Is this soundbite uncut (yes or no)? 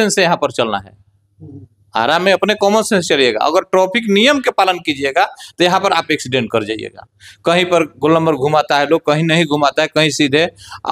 yes